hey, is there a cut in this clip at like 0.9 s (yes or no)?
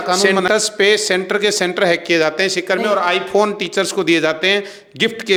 no